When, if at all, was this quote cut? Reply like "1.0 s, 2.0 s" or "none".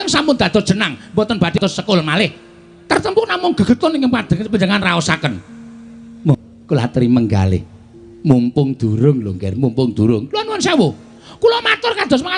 1.6 s, 6.3 s